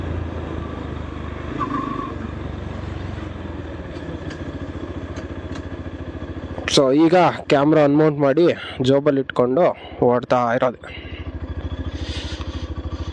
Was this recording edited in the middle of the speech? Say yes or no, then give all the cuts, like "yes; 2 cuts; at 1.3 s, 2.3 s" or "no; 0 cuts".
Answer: no; 0 cuts